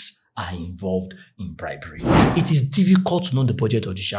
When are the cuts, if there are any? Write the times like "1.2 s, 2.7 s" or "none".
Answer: 2.0 s

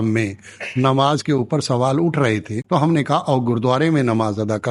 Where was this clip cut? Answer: none

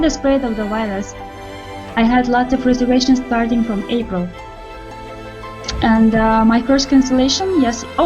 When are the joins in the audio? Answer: none

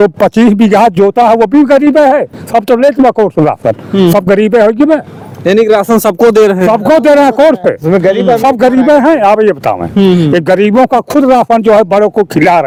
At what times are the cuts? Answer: none

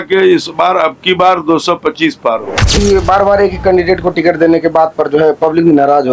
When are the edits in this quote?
2.8 s

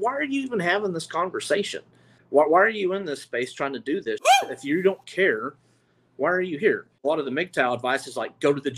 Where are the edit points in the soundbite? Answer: 2.1 s, 7.0 s

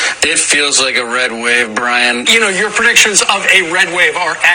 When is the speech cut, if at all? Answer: none

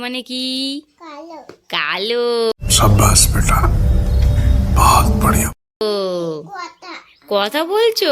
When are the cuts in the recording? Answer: none

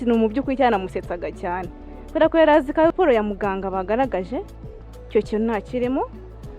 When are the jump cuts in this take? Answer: 2.9 s

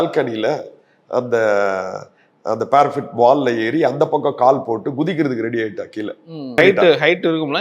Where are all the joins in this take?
6.5 s

